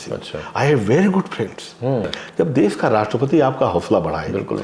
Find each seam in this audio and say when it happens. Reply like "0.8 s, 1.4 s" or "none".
2.1 s